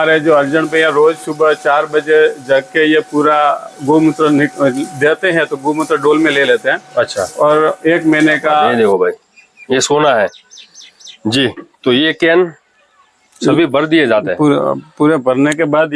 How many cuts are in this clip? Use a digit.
1